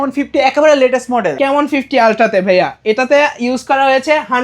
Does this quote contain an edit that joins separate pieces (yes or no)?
yes